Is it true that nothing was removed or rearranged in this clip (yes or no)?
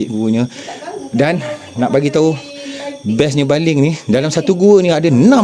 yes